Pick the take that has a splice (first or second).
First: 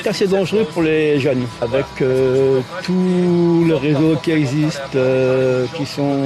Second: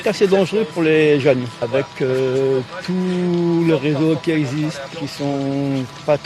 second